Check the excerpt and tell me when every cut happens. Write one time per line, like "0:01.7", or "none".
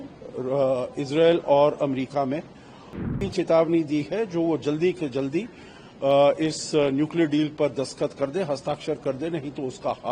0:03.1